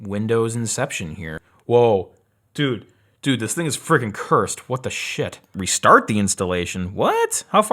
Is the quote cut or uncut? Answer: cut